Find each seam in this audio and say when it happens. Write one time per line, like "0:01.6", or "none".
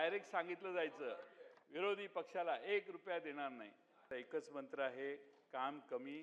0:04.1

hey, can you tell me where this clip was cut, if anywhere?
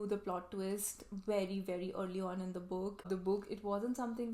0:03.0

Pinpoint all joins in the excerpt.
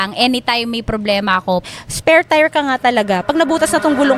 0:01.6

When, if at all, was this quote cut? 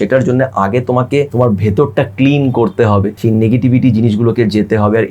0:01.3
0:03.1

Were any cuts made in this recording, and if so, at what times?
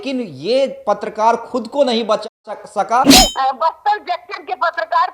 0:03.1

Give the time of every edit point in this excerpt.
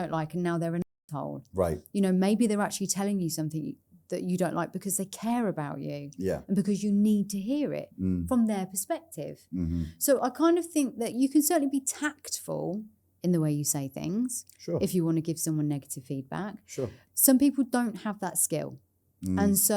0:17.0

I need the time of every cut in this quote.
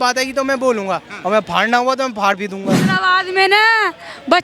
0:02.8

